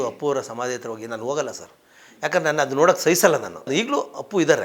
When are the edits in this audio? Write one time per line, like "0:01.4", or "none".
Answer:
0:03.7